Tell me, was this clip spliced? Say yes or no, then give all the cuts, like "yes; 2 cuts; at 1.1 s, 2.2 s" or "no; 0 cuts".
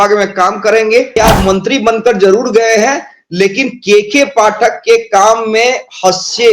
yes; 1 cut; at 1.1 s